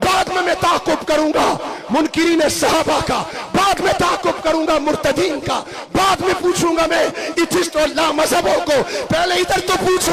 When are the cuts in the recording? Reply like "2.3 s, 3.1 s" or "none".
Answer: none